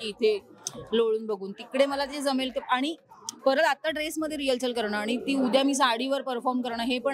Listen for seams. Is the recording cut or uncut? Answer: uncut